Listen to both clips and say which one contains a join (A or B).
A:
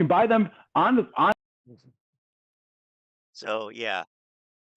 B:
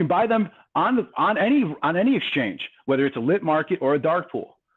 B